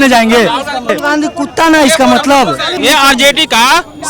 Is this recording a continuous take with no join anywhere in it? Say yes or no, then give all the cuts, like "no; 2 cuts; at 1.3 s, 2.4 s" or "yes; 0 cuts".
no; 2 cuts; at 0.9 s, 2.7 s